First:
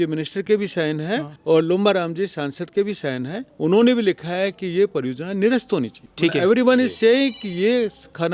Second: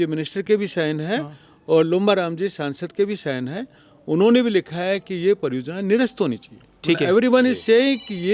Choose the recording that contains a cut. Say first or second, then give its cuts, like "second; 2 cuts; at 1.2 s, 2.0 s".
first; 3 cuts; at 1.3 s, 3.4 s, 6.0 s